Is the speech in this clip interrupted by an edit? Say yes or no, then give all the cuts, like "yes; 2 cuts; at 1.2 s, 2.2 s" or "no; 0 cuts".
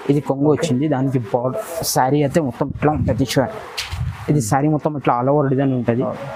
no; 0 cuts